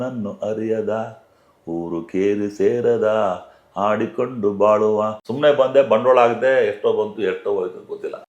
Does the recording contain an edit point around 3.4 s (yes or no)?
no